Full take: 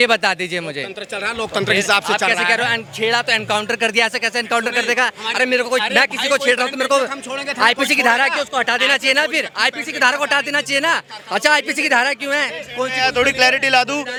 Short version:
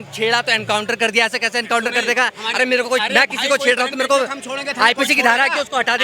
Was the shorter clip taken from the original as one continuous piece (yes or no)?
yes